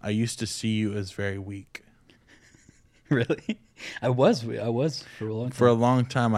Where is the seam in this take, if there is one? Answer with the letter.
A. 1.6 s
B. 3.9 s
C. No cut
C